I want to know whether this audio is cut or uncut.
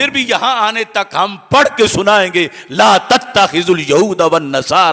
uncut